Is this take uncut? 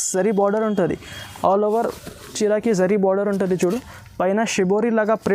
yes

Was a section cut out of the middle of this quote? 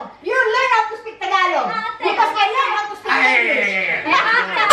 no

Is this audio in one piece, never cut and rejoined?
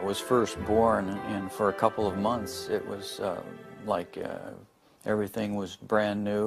no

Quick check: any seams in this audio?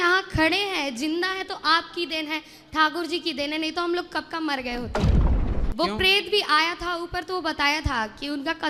no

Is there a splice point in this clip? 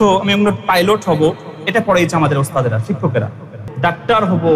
yes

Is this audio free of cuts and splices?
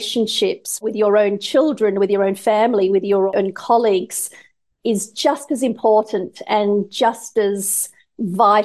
no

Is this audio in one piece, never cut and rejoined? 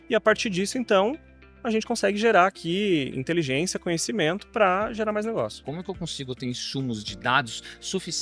no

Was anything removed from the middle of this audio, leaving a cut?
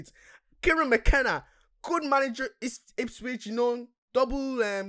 no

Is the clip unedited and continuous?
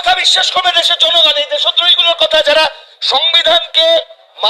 yes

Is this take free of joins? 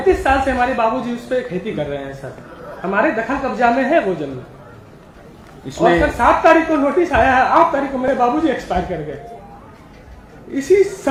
yes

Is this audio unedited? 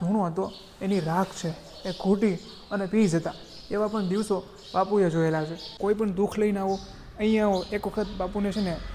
no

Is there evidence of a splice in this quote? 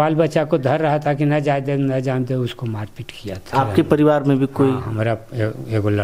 yes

